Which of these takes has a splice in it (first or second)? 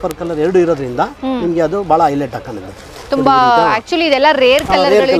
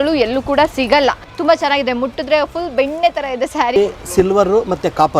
second